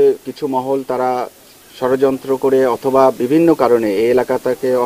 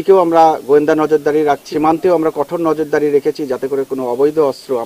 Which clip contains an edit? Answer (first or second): second